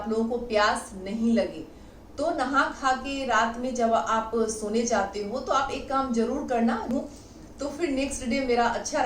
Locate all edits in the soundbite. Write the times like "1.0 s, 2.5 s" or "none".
6.9 s